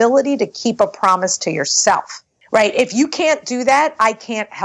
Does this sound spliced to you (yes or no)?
no